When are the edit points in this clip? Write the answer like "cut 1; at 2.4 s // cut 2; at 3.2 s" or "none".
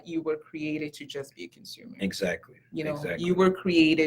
none